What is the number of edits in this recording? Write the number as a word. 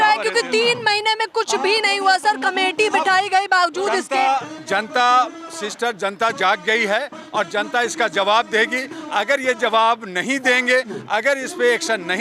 zero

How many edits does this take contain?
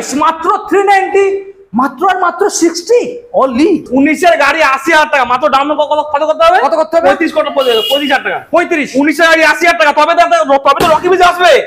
one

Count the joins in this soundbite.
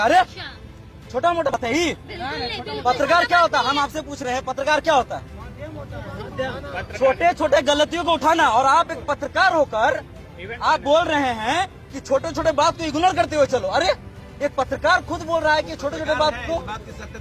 one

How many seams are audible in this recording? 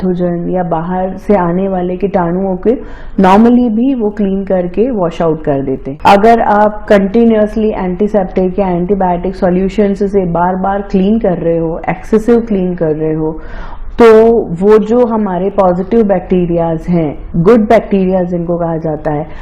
one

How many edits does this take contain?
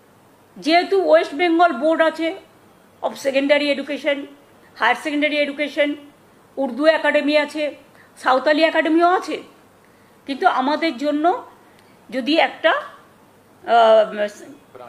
zero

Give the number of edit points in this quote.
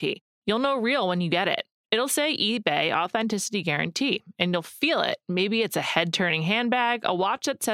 zero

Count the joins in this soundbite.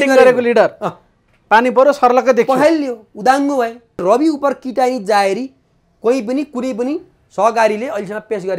one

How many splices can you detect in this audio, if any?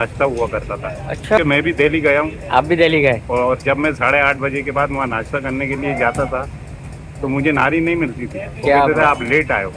one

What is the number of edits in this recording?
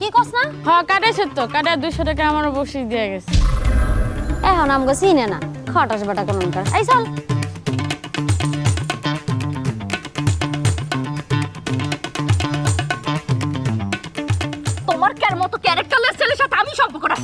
two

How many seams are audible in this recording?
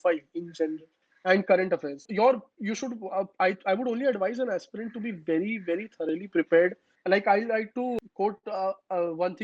three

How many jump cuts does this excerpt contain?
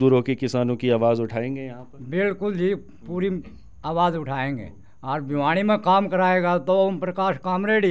zero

